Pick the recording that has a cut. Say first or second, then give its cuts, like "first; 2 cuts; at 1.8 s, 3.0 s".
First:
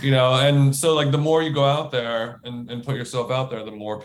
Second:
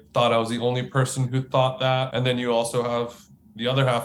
second; 1 cut; at 2.1 s